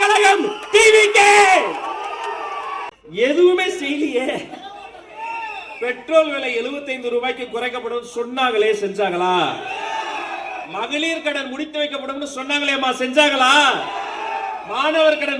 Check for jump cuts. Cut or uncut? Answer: cut